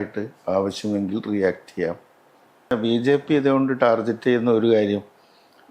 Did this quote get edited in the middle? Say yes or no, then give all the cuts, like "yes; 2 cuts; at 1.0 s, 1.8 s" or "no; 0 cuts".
yes; 1 cut; at 2.7 s